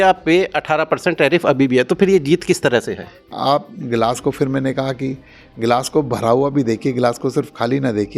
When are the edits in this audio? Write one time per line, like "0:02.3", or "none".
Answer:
0:03.3